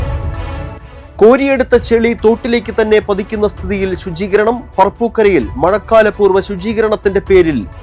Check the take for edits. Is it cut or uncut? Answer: cut